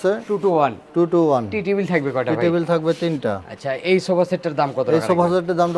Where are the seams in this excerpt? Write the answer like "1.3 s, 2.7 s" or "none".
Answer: none